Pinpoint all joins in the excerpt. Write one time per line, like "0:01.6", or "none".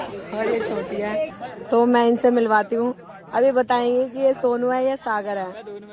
0:01.4

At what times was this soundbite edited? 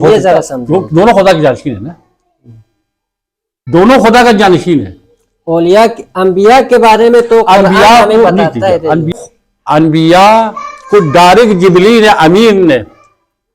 0:09.1

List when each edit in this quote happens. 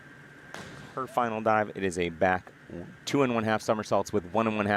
0:01.0

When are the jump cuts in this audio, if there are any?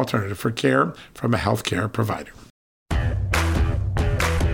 0:02.5

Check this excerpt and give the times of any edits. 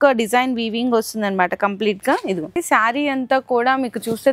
0:02.6

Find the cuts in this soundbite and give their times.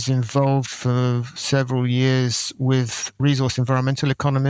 0:01.3

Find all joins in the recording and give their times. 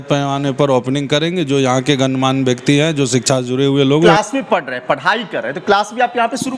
0:04.1

